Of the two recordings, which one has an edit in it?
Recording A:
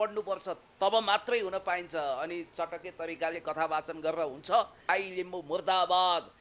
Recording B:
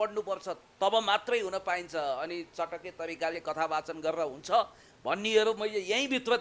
A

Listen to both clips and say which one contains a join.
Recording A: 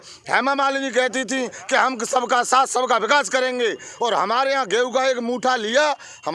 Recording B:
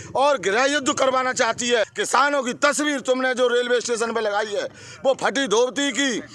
B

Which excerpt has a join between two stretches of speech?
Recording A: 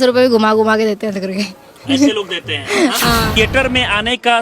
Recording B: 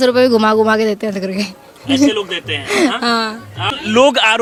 A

